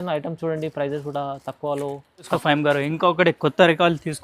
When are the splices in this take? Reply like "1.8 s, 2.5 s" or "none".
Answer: 2.3 s